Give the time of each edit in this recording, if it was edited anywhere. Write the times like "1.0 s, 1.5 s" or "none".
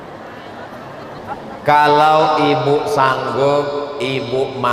1.2 s